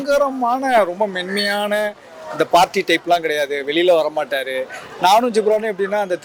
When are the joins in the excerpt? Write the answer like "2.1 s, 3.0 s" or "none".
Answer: none